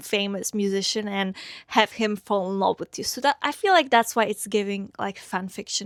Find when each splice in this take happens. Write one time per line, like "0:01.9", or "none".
none